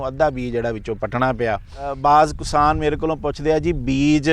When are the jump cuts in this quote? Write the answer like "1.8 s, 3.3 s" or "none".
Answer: 1.9 s

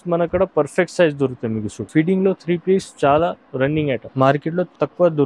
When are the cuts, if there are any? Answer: 1.8 s, 4.1 s

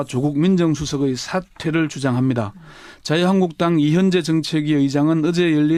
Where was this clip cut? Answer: none

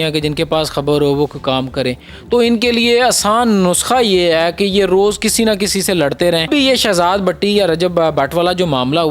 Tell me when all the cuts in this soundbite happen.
6.4 s

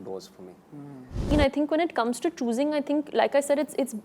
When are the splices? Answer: 1.3 s

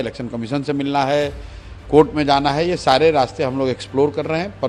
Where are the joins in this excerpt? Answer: none

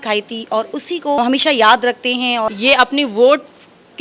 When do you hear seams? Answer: 1.2 s, 2.5 s

